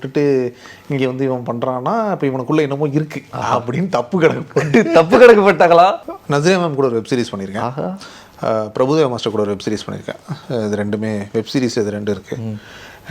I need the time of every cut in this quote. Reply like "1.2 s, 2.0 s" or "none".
6.1 s